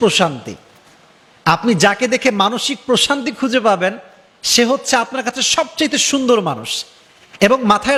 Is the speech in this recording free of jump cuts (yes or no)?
yes